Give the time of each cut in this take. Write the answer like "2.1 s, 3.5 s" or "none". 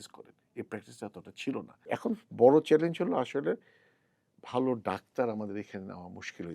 1.7 s